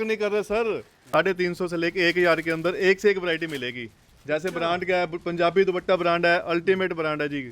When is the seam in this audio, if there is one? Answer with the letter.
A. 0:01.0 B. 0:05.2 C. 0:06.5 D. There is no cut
A